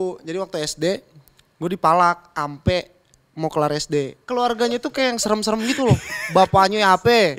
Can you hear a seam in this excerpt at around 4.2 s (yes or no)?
yes